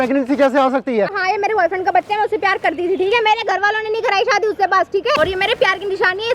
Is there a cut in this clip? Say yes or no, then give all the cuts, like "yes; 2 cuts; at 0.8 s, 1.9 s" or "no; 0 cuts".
yes; 2 cuts; at 1.2 s, 5.2 s